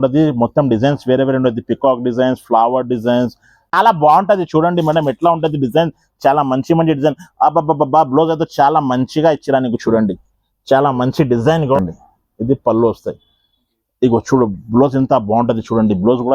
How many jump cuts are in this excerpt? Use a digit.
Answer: 2